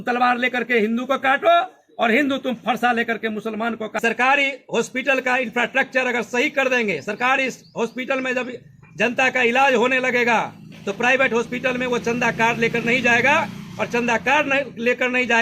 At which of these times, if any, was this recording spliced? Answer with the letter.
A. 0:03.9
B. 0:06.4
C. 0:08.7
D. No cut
A